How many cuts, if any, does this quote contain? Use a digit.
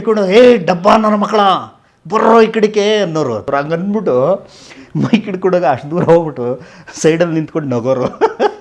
1